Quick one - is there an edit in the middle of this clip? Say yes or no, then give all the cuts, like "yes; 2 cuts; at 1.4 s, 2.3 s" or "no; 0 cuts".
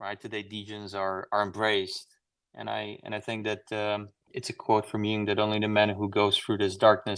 yes; 1 cut; at 4.3 s